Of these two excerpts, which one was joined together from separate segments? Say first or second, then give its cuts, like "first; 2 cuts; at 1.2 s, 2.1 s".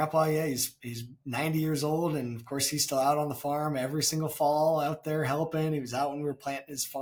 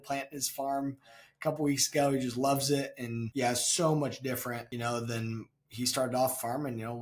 second; 2 cuts; at 3.2 s, 4.7 s